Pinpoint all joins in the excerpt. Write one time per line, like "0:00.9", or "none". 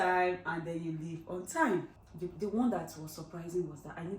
0:01.9

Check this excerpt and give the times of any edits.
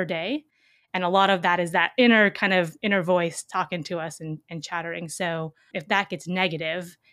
0:05.7

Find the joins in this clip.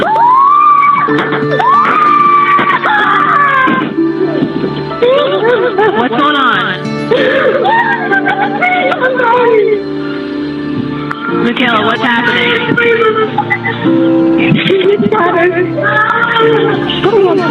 none

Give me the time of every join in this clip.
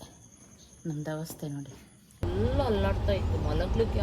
0:02.2

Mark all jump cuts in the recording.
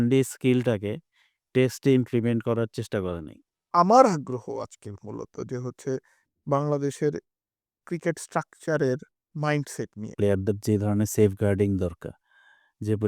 0:03.6
0:10.0

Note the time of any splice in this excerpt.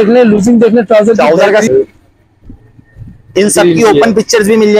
0:01.7

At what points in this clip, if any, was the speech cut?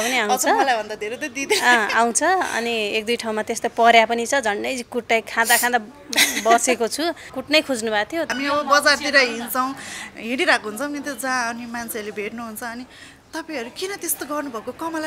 0:07.3
0:08.3

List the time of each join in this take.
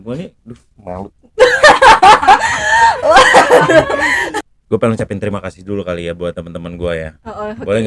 0:04.3

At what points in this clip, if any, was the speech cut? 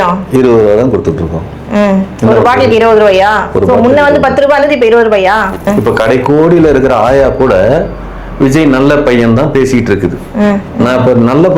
0:05.6

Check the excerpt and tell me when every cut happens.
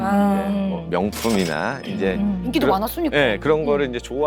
none

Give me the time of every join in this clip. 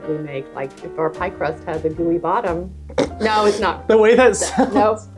0:02.8

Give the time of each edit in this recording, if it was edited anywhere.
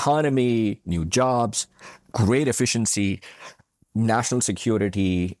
0:02.0

